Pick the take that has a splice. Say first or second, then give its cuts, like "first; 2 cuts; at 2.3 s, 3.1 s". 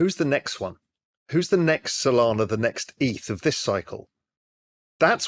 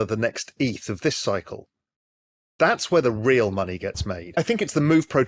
second; 1 cut; at 4.2 s